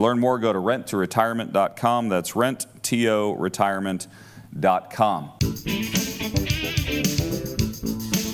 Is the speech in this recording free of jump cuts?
no; 1 cut; at 5.3 s

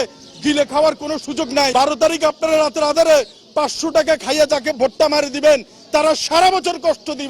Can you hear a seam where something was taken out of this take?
yes; 1 cut; at 1.7 s

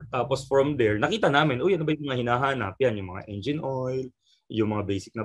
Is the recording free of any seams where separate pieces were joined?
yes; 0 cuts

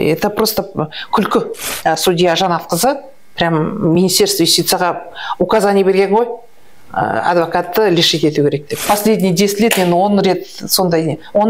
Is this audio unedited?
no; 2 cuts; at 1.6 s, 8.8 s

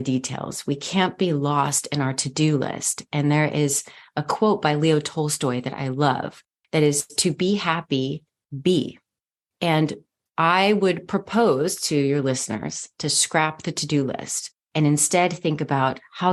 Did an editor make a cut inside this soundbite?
no; 0 cuts

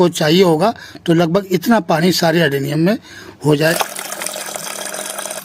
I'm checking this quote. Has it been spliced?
yes; 1 cut; at 3.8 s

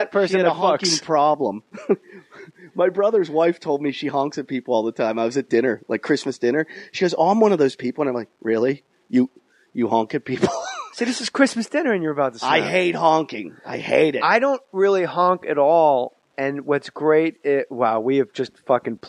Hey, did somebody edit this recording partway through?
yes; 1 cut; at 12.0 s

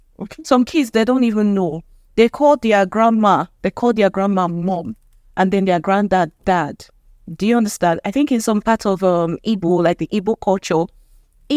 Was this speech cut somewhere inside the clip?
no; 0 cuts

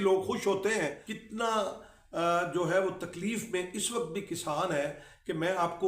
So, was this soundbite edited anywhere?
yes; 1 cut; at 1.1 s

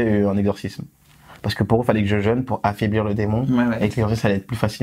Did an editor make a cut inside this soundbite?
no; 0 cuts

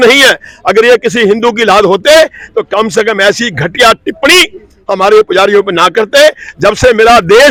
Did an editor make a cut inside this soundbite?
no; 0 cuts

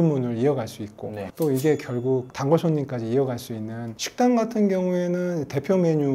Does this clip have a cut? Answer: yes; 1 cut; at 3.9 s

